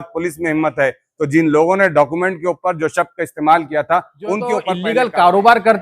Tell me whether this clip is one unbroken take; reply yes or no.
no